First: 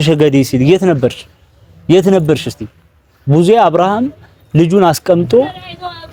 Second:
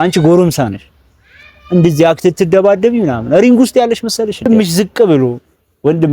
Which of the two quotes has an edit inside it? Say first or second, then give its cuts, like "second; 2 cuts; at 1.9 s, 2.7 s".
second; 1 cut; at 4.5 s